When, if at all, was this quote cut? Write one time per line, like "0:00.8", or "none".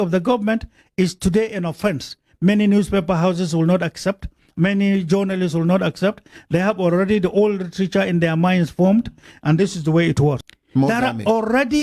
0:10.5